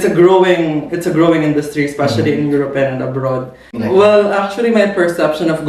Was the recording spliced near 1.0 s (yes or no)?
no